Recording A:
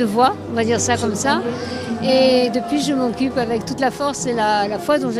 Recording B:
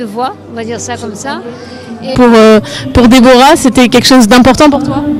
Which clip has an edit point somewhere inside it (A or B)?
A